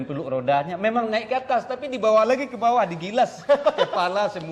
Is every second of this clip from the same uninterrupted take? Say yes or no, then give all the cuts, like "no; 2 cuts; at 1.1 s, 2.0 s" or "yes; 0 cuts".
yes; 0 cuts